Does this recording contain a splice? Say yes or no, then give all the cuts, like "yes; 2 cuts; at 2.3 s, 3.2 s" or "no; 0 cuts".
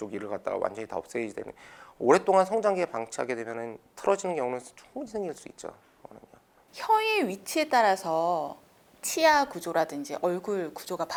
no; 0 cuts